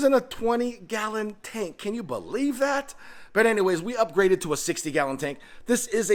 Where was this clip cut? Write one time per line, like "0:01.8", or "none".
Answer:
none